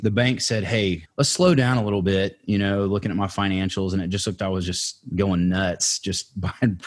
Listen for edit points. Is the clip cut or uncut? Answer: cut